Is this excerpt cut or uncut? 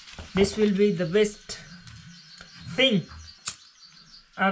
cut